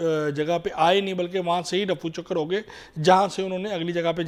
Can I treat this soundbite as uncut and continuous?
yes; 0 cuts

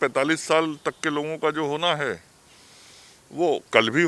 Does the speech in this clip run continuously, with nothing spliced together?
yes; 0 cuts

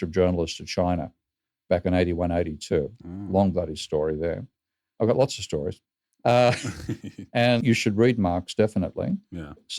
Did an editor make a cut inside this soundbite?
yes; 1 cut; at 7.6 s

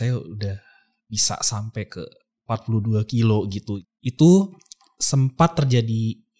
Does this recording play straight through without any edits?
no; 1 cut; at 3.7 s

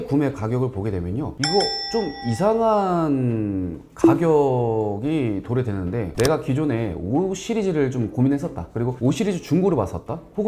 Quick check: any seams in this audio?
no; 0 cuts

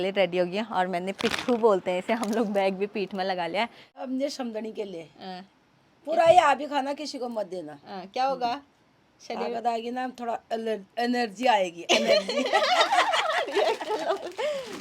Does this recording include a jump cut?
yes; 1 cut; at 3.9 s

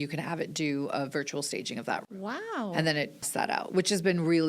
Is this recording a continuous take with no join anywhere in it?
no; 1 cut; at 3.3 s

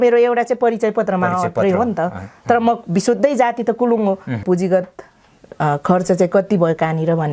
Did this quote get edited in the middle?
yes; 1 cut; at 4.4 s

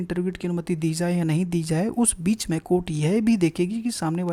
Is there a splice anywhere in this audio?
no; 0 cuts

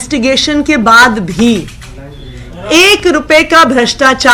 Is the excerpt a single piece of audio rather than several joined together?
yes; 0 cuts

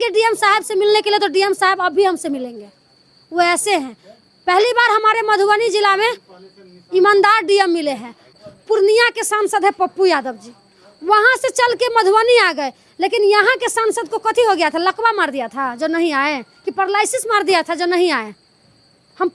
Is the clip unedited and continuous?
no; 1 cut; at 8.4 s

